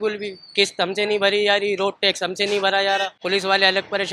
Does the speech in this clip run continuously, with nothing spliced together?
no; 1 cut; at 3.1 s

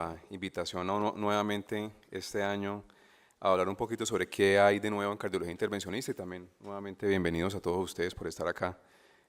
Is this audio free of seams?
yes; 0 cuts

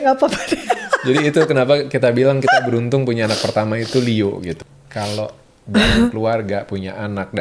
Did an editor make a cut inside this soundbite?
yes; 1 cut; at 4.5 s

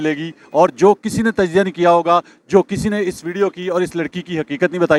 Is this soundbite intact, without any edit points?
yes; 0 cuts

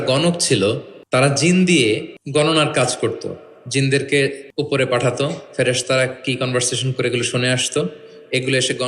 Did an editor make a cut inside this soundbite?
yes; 3 cuts; at 0.9 s, 2.1 s, 4.4 s

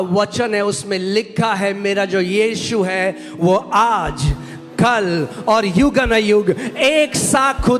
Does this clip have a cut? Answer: no; 0 cuts

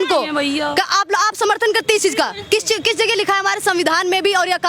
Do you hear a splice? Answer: no; 0 cuts

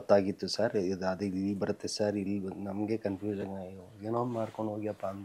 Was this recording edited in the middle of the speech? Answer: no; 0 cuts

